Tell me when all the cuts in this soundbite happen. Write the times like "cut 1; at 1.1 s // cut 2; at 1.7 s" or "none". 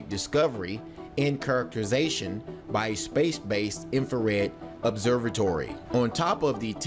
none